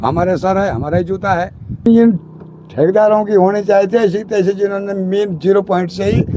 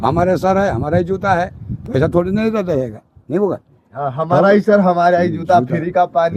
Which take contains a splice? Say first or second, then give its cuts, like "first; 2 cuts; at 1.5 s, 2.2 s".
first; 1 cut; at 1.9 s